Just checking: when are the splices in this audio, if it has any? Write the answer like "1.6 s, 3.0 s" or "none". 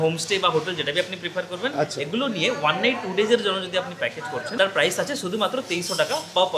4.5 s